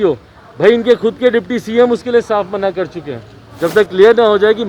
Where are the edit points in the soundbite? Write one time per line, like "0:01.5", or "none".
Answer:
0:03.4